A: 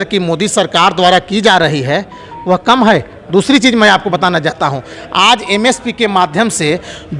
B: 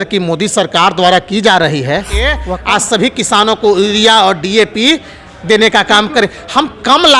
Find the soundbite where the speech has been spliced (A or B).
B